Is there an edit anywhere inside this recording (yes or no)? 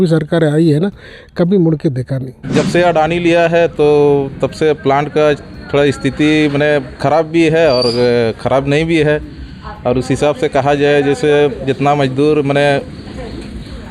yes